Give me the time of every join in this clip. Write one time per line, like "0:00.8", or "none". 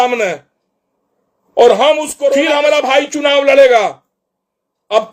0:02.4